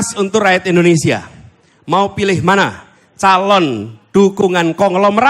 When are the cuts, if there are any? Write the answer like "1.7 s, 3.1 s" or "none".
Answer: none

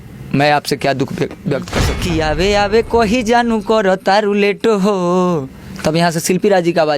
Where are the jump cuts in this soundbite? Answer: 1.9 s

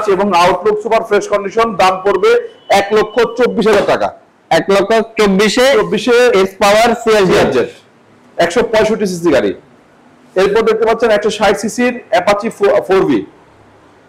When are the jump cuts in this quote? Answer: none

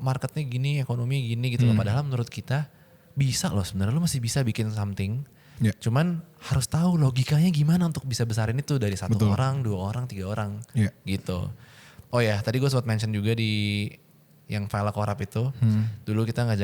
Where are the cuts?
none

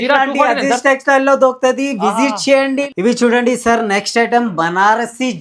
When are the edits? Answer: none

